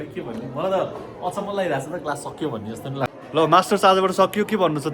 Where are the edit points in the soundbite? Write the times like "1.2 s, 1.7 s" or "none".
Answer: 3.1 s